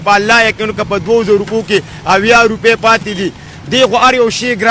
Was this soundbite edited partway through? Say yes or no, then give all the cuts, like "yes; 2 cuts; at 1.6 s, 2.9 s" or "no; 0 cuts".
no; 0 cuts